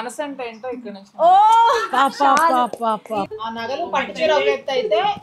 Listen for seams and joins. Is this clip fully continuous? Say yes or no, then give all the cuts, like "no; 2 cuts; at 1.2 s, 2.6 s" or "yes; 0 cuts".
no; 1 cut; at 3.3 s